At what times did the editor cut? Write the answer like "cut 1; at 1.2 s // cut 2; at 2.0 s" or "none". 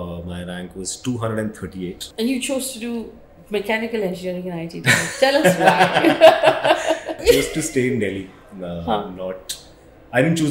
cut 1; at 2.1 s // cut 2; at 7.1 s